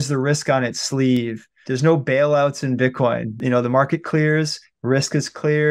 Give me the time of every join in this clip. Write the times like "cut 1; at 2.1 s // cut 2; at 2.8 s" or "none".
cut 1; at 1.6 s // cut 2; at 3.4 s